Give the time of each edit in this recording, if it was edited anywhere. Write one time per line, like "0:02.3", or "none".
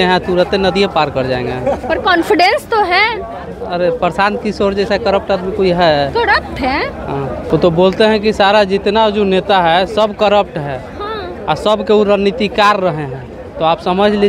0:07.5